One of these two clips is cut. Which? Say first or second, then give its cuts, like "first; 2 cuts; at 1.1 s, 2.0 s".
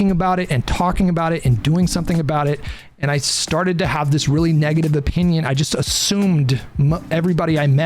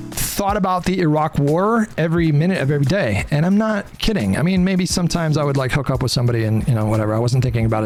first; 1 cut; at 2.8 s